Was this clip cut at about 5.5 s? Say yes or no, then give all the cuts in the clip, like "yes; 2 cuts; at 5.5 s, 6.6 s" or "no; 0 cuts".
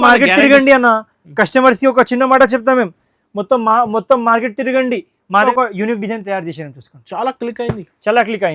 yes; 1 cut; at 5.5 s